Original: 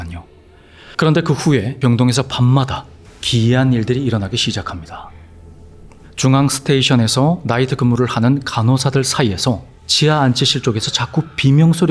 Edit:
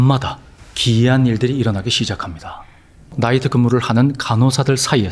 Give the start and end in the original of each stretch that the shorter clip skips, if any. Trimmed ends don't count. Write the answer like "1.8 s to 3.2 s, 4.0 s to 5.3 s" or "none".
5.6 s to 7.4 s